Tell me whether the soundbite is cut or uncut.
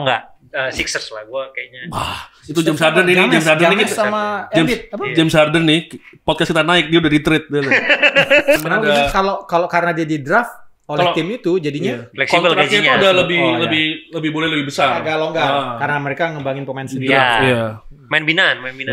cut